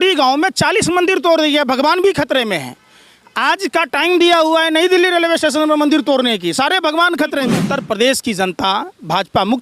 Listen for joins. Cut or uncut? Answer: cut